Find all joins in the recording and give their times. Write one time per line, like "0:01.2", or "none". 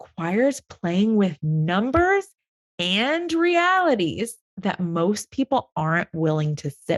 none